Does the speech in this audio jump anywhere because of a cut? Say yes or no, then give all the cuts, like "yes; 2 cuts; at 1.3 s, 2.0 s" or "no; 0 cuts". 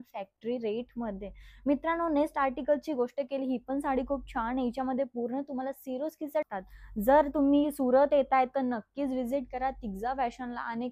yes; 1 cut; at 6.5 s